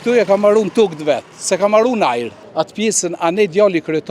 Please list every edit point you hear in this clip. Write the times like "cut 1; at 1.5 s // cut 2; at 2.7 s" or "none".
cut 1; at 2.4 s